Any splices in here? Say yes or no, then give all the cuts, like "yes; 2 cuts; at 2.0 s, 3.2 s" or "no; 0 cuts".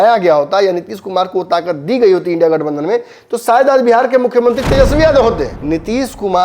yes; 1 cut; at 5.5 s